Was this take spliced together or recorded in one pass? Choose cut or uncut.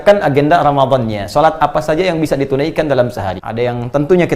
cut